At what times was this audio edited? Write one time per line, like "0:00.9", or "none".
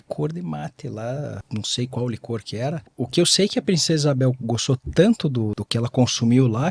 0:01.4
0:02.9
0:05.6